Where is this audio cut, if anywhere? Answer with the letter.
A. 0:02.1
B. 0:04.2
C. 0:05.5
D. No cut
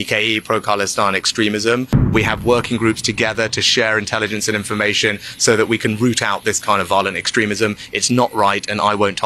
A